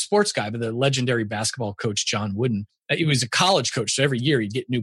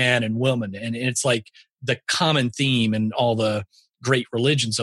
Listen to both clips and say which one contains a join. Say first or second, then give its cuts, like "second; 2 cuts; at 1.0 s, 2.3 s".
first; 1 cut; at 2.7 s